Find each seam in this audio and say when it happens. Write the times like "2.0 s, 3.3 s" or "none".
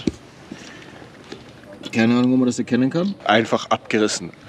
3.2 s